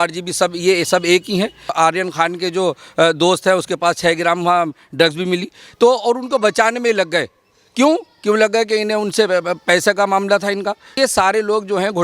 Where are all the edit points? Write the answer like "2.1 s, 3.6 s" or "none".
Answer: 1.7 s, 10.9 s